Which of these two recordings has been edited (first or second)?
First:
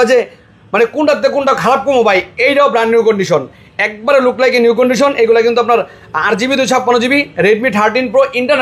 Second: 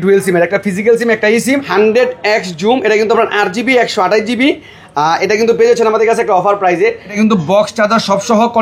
second